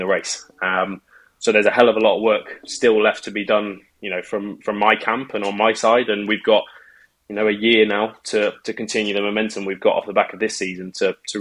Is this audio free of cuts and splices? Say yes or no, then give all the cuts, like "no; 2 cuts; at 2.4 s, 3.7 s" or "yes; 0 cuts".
yes; 0 cuts